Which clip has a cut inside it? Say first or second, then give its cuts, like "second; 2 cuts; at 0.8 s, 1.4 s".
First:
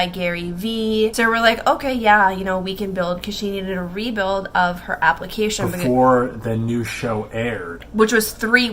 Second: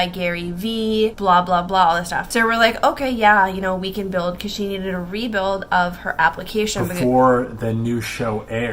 first; 1 cut; at 1.1 s